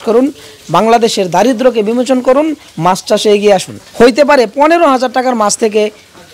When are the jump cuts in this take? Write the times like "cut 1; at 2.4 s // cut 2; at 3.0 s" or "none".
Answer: cut 1; at 3.8 s